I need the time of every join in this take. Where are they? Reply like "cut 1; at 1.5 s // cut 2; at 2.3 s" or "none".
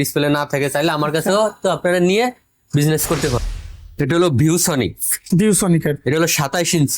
cut 1; at 3.4 s